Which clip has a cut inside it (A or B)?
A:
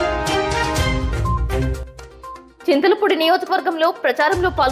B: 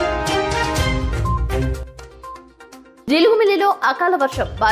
A